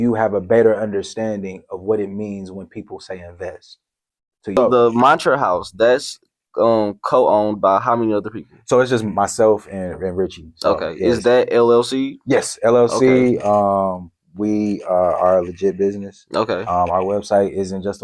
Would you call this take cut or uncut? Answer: cut